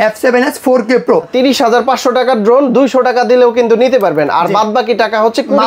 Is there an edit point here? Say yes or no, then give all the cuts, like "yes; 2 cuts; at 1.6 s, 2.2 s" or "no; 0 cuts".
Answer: yes; 1 cut; at 1.3 s